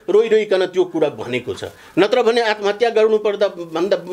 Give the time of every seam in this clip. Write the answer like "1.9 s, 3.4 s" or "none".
none